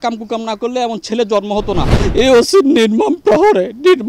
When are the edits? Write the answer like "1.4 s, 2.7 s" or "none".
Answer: 1.9 s